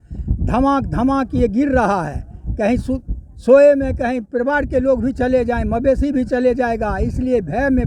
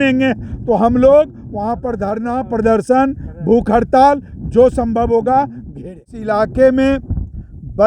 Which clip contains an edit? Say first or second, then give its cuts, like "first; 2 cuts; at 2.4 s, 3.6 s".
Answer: second; 1 cut; at 6.2 s